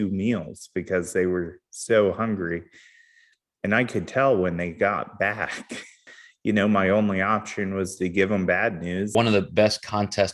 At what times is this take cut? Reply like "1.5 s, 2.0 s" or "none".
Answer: 6.0 s, 9.1 s